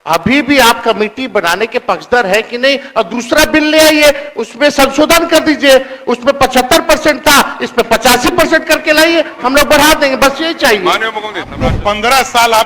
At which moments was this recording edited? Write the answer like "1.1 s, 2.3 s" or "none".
11.6 s